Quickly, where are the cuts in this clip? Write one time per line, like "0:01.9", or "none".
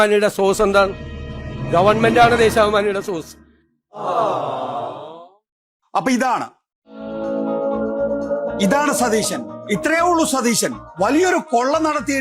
0:07.1